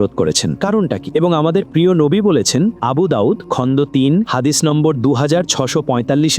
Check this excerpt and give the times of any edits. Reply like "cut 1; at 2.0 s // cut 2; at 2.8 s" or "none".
none